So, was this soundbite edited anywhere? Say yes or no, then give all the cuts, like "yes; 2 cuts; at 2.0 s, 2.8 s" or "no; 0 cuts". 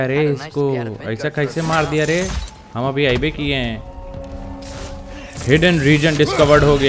no; 0 cuts